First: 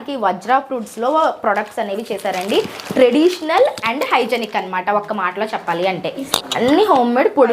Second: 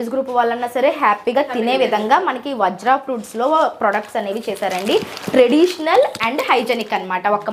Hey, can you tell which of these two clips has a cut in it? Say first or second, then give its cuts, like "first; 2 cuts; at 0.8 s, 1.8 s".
first; 1 cut; at 6.2 s